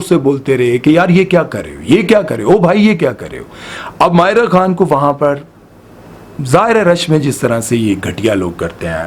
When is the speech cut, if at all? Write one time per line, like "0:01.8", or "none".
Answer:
none